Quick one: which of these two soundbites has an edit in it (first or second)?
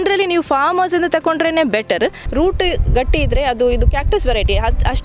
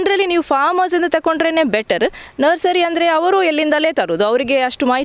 first